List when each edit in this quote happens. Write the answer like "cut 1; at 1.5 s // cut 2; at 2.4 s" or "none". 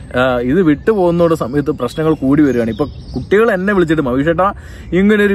none